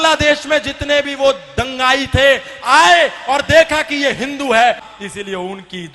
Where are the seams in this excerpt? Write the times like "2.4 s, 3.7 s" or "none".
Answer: 4.9 s

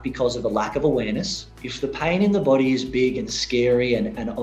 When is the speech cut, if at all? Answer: 1.5 s

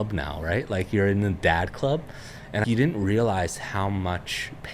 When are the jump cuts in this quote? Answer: 2.6 s

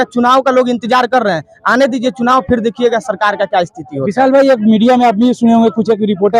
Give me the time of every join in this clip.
none

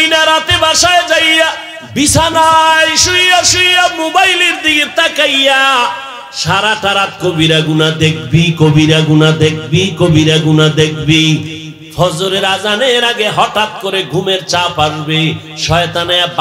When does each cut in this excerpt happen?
1.7 s

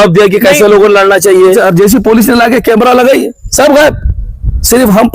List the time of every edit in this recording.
1.5 s

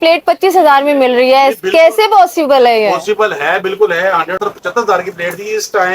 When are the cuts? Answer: 4.4 s

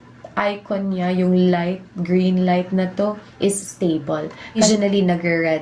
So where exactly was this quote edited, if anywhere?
4.6 s

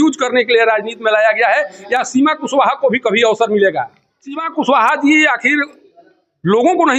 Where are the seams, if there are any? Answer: 4.5 s

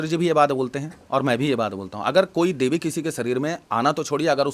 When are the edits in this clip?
none

